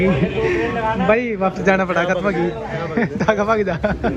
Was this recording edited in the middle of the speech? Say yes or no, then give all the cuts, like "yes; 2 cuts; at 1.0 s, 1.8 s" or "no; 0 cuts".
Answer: no; 0 cuts